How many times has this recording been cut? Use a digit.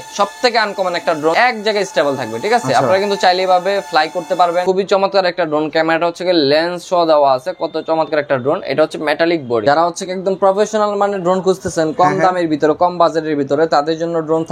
3